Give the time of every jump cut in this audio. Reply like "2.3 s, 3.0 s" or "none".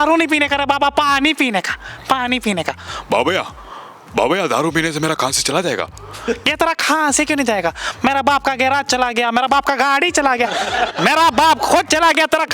none

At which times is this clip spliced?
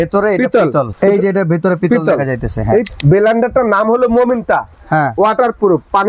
0.9 s, 2.9 s

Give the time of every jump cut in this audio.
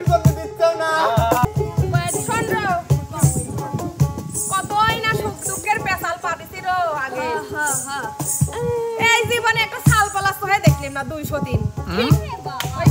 1.5 s

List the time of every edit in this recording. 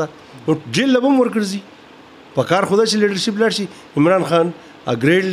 none

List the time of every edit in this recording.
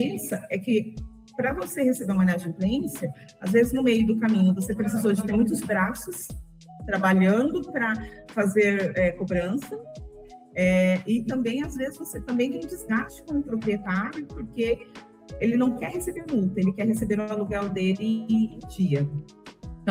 none

